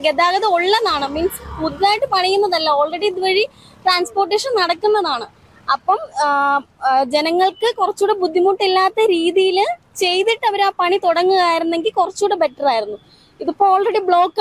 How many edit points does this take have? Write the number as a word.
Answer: zero